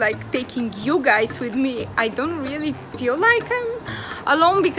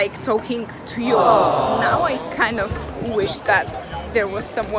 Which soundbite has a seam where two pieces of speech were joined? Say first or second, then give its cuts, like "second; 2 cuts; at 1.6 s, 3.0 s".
second; 1 cut; at 2.0 s